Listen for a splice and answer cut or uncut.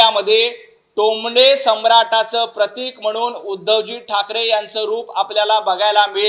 uncut